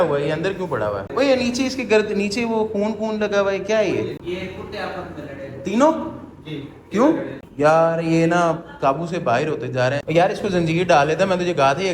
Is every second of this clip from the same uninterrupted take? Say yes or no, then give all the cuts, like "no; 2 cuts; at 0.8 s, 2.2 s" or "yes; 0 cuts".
no; 4 cuts; at 1.0 s, 4.2 s, 7.4 s, 10.0 s